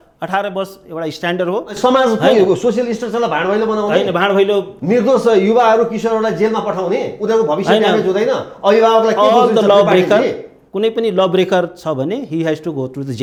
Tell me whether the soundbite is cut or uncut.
uncut